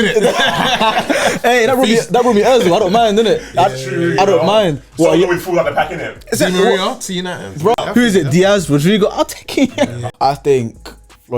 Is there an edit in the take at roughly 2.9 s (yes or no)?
no